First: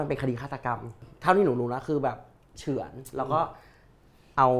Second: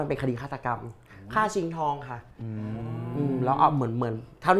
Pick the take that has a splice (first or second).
first